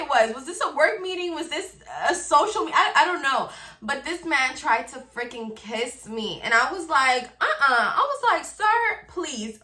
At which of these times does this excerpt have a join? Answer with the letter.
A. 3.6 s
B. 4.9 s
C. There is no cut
C